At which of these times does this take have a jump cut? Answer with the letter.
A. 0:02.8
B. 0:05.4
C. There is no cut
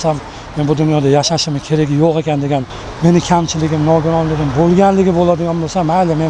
A